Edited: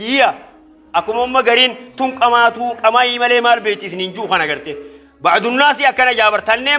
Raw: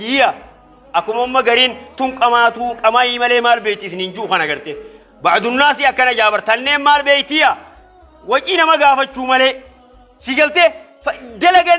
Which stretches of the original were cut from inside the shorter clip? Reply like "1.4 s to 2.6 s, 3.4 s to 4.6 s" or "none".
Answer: none